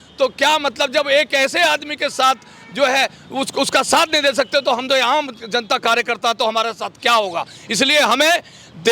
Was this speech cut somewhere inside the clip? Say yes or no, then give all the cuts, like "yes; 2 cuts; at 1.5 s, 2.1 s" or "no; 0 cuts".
no; 0 cuts